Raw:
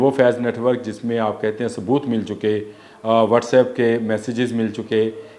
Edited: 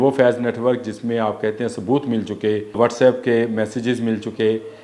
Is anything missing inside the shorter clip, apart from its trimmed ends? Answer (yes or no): yes